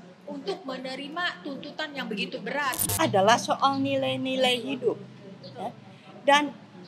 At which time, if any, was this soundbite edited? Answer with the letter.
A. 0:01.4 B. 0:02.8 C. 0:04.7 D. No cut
B